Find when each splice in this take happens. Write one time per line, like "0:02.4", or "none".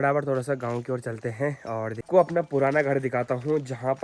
0:02.0